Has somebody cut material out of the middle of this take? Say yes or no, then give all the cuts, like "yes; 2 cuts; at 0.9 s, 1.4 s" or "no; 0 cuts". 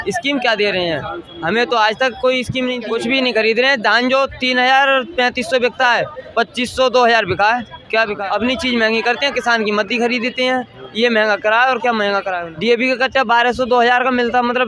yes; 3 cuts; at 2.8 s, 8.1 s, 12.4 s